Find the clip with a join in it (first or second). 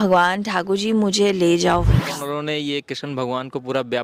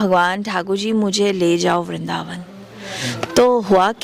first